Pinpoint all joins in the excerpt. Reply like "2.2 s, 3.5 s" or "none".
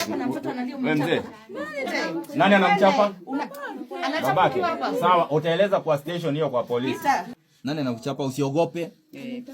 1.9 s, 7.3 s